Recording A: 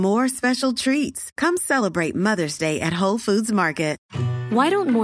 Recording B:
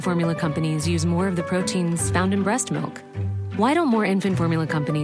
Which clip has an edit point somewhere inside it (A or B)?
A